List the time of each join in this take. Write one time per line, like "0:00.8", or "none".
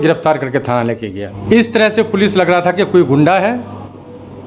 0:01.3